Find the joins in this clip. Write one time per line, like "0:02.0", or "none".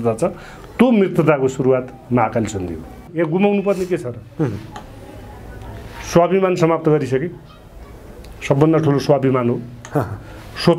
0:03.0

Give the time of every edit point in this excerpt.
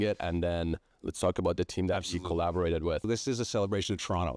0:00.9
0:03.0

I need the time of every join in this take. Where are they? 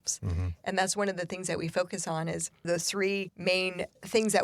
0:02.7

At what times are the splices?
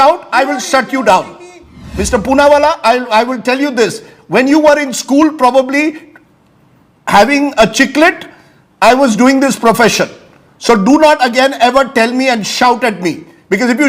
none

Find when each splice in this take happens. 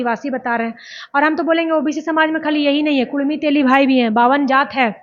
none

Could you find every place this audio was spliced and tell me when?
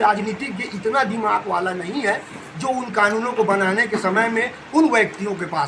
none

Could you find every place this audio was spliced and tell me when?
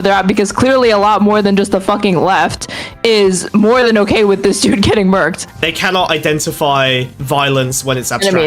0:05.6
0:07.1

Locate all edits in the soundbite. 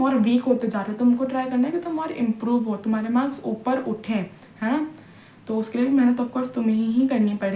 none

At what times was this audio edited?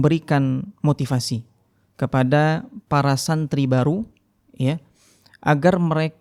none

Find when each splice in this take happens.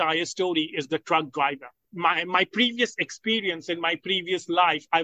0:01.8

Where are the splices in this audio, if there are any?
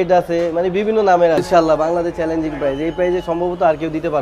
0:01.4

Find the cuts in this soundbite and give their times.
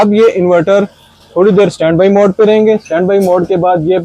none

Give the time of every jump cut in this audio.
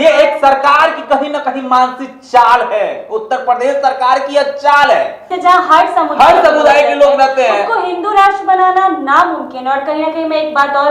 0:05.3

